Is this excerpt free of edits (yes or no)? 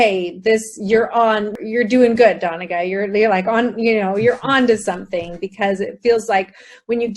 no